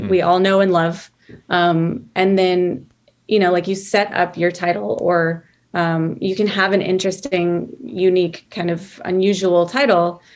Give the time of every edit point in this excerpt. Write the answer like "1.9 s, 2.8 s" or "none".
none